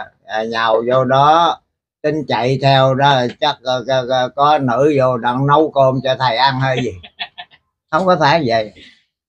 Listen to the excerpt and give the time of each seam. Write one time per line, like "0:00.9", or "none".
none